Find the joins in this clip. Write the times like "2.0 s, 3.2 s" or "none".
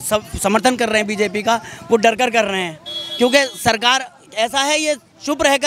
none